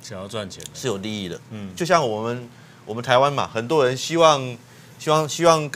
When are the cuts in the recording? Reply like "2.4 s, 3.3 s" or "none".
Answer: none